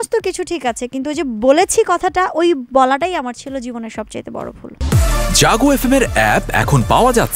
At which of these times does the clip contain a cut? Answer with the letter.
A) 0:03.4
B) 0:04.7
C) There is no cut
B